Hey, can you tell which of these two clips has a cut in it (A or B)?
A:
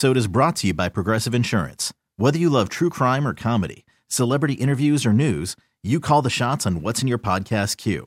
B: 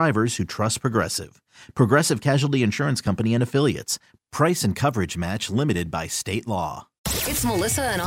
B